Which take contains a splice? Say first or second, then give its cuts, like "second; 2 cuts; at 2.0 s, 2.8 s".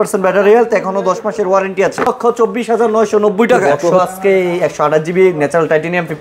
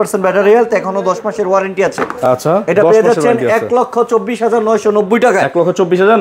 first; 2 cuts; at 2.1 s, 3.9 s